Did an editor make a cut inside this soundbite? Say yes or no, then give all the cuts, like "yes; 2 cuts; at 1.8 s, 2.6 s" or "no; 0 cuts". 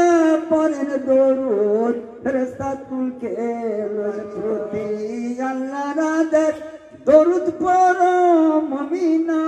yes; 1 cut; at 4.3 s